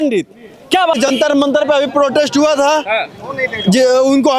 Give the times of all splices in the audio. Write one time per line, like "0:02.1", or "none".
0:00.9